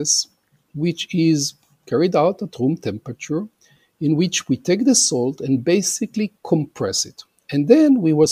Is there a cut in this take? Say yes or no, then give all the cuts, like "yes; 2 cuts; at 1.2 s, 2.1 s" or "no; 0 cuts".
no; 0 cuts